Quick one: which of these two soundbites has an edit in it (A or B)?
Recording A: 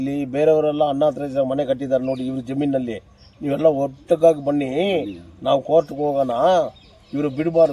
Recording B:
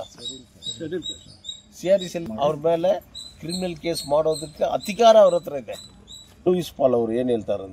B